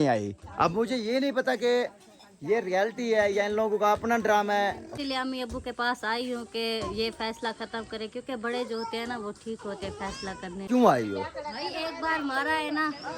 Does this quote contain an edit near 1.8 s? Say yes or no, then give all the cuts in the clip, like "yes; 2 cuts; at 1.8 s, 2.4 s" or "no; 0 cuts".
no; 2 cuts; at 4.9 s, 10.6 s